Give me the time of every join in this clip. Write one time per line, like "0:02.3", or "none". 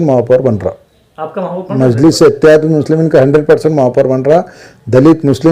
none